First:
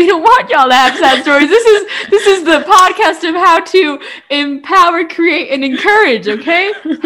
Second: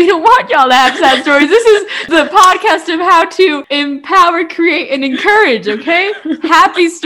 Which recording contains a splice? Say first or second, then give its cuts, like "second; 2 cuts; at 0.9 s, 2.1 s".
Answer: second; 2 cuts; at 2.0 s, 3.7 s